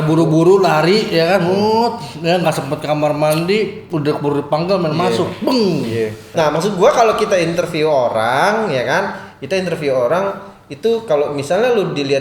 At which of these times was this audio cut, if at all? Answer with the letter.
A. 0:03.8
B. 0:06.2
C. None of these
B